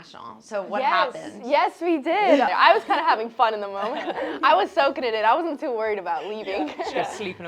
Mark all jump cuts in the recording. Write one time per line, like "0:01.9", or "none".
0:02.5